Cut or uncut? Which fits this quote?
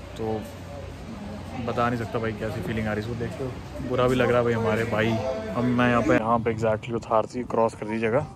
cut